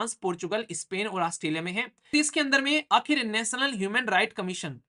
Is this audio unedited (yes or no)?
no